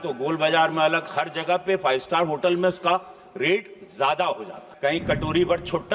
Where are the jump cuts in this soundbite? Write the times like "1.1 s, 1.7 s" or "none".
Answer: 4.7 s